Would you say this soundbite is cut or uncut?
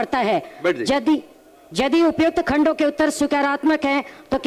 uncut